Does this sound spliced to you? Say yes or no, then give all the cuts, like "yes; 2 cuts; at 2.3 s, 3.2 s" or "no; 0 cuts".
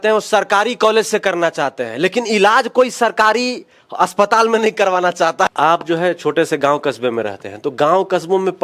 yes; 1 cut; at 5.5 s